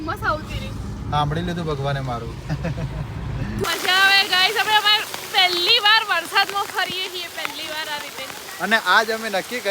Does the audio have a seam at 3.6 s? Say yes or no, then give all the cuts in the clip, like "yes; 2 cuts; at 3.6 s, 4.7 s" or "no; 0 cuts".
yes; 1 cut; at 3.6 s